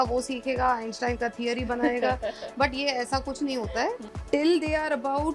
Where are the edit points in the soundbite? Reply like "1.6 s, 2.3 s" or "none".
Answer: 4.0 s